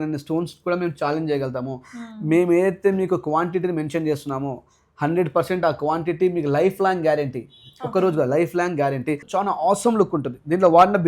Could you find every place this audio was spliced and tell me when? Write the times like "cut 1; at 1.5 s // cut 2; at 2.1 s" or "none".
cut 1; at 9.3 s